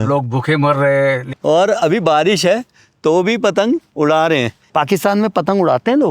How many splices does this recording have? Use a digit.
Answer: 2